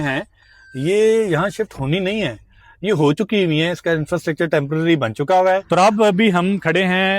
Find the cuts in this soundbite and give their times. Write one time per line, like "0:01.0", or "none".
0:05.6